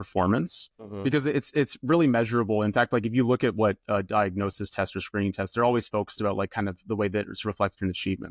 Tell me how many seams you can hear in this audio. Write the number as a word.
zero